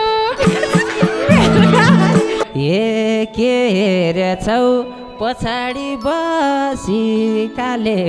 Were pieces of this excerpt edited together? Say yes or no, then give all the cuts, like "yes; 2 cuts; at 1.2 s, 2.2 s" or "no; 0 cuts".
yes; 1 cut; at 2.4 s